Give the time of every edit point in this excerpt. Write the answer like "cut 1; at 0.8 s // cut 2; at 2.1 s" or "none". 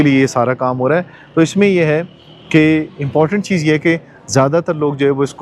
none